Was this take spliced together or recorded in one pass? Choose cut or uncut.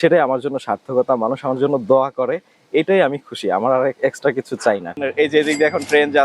cut